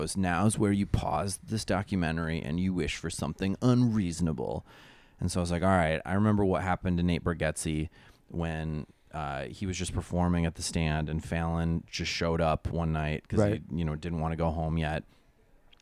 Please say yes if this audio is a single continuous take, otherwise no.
yes